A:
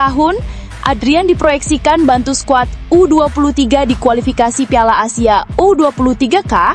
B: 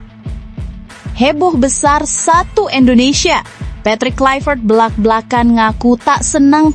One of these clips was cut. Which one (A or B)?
B